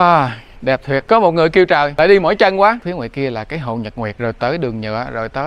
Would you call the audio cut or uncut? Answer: cut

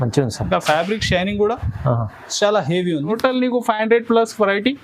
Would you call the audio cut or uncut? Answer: cut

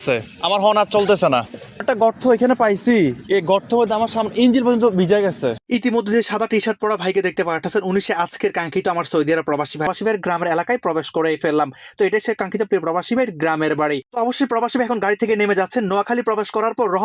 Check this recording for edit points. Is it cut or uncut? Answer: cut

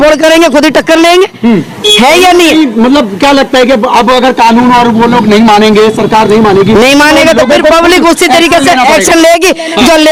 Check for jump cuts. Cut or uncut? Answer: uncut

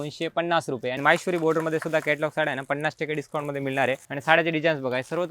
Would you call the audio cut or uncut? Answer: cut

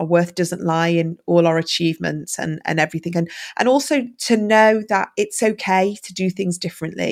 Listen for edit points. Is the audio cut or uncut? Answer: uncut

